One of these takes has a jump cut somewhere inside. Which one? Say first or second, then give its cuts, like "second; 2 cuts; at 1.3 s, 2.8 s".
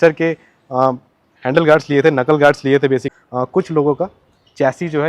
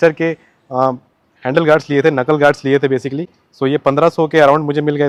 first; 1 cut; at 3.2 s